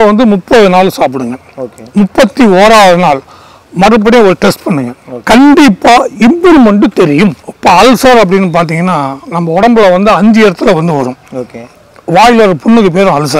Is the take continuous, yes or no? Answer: no